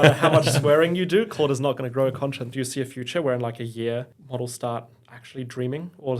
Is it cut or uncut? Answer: cut